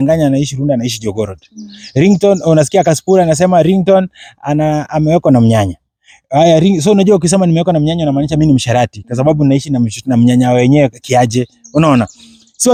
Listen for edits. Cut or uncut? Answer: uncut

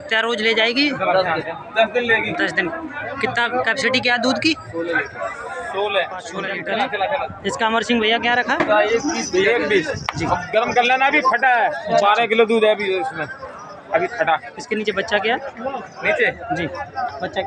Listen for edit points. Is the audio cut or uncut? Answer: cut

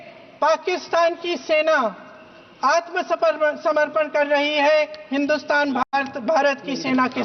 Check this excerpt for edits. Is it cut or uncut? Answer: uncut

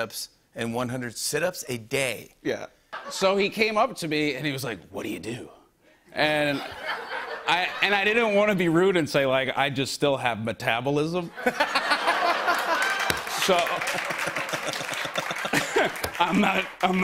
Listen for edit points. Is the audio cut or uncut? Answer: cut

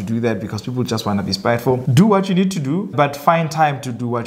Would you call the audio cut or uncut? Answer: cut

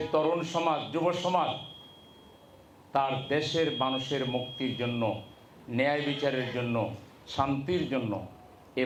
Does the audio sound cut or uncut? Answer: uncut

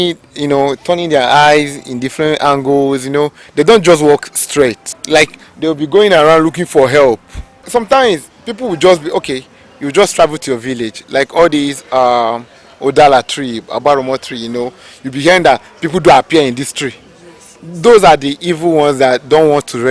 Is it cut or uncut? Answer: cut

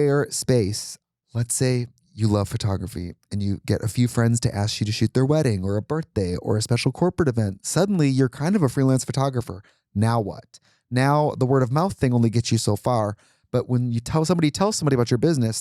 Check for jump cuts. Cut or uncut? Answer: cut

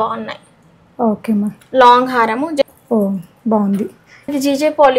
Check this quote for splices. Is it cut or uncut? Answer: cut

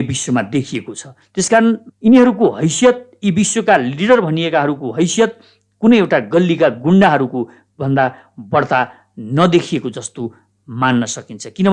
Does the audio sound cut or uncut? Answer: uncut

